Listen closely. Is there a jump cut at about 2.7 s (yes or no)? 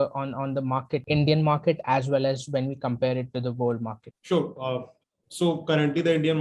no